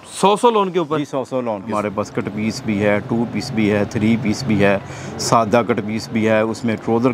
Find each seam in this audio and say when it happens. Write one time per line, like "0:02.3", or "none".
0:01.7